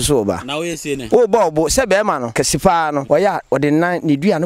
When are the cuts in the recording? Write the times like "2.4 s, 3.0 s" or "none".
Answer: 0.9 s, 2.6 s